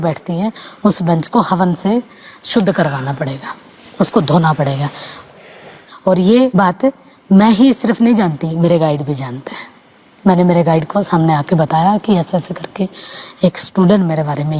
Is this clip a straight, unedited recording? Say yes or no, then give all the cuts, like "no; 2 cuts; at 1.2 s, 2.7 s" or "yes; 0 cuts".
yes; 0 cuts